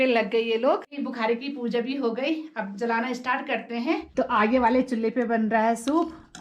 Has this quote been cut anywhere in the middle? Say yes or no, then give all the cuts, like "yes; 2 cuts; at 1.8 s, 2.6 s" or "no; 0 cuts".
yes; 2 cuts; at 0.9 s, 4.1 s